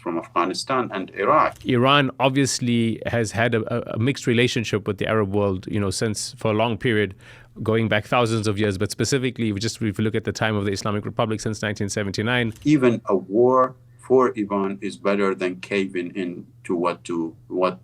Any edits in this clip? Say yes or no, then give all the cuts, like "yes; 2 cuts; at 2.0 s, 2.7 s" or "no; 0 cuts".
yes; 2 cuts; at 1.5 s, 12.6 s